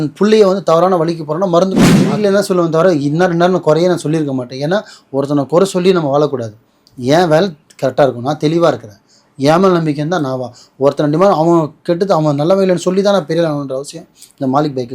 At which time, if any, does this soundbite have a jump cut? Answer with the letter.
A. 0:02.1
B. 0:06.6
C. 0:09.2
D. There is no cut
A